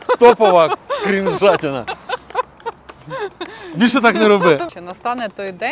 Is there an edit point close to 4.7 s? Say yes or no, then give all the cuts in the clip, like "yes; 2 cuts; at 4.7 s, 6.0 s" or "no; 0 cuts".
yes; 1 cut; at 4.7 s